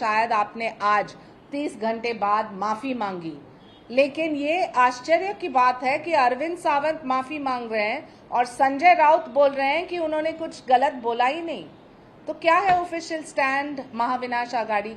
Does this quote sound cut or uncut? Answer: uncut